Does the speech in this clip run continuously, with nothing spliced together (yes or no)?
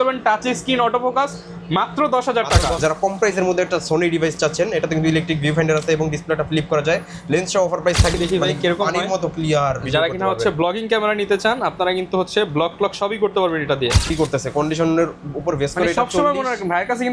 no